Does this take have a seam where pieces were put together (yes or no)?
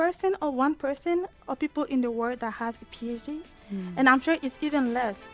no